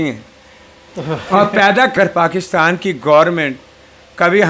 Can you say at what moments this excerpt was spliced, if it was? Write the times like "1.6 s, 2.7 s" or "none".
1.9 s